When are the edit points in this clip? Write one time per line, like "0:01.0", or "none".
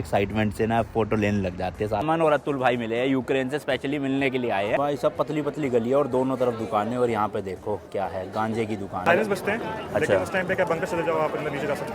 0:02.0
0:04.8
0:09.0